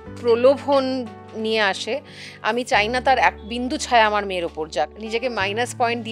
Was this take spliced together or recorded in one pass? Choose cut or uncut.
cut